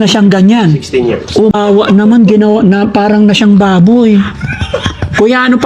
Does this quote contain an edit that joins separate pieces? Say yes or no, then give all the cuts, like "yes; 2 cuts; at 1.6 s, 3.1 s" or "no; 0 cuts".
yes; 1 cut; at 1.5 s